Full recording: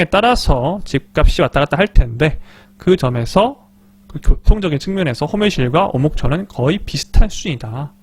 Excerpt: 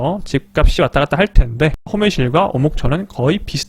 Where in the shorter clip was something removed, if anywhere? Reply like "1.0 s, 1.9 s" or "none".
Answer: 1.9 s